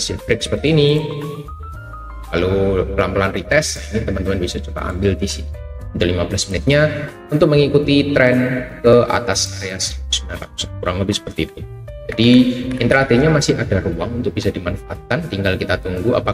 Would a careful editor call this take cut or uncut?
uncut